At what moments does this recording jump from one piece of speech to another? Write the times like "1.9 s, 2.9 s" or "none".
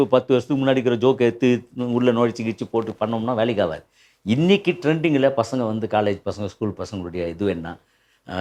none

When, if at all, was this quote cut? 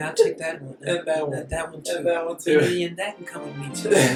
none

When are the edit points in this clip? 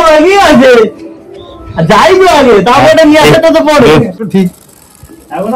4.3 s

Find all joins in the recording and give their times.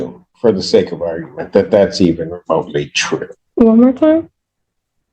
3.4 s

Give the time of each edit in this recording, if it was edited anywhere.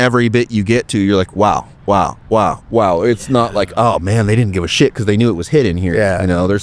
none

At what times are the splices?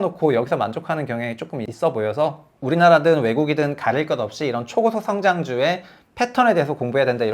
1.7 s, 2.5 s

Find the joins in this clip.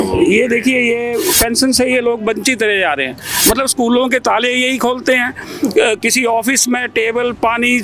1.3 s, 3.3 s

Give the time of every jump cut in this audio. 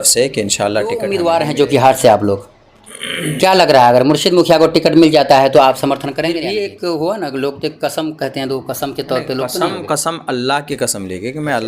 1.1 s, 6.3 s

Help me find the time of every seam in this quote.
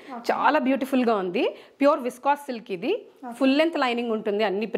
none

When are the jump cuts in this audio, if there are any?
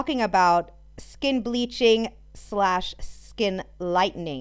none

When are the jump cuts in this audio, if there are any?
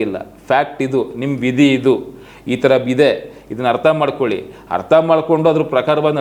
none

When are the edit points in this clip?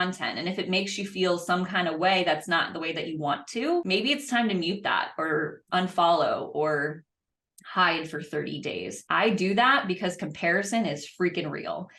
none

